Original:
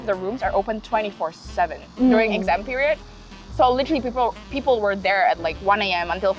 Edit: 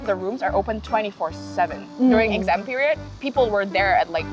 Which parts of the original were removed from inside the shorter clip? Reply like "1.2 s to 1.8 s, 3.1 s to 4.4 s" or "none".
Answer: 3.2 s to 4.5 s